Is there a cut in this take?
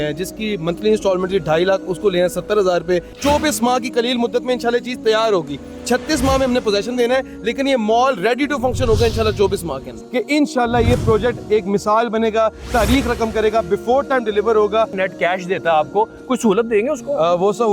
yes; 3 cuts; at 3.1 s, 9.9 s, 15.0 s

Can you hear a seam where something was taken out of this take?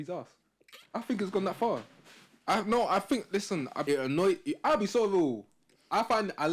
yes; 1 cut; at 3.8 s

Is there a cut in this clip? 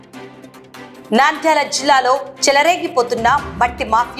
yes; 1 cut; at 1.0 s

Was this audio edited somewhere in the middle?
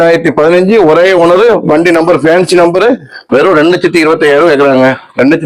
yes; 1 cut; at 3.1 s

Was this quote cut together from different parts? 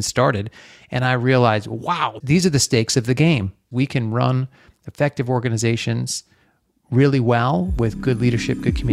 yes; 2 cuts; at 2.1 s, 3.7 s

